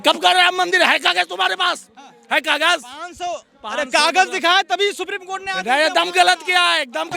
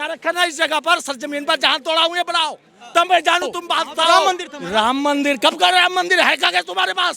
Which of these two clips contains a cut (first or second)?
second